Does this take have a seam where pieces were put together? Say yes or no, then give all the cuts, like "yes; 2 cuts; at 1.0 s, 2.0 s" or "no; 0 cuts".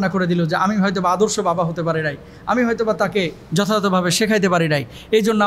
no; 0 cuts